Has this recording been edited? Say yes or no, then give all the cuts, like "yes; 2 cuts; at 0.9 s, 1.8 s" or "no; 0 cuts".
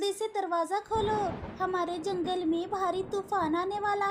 no; 0 cuts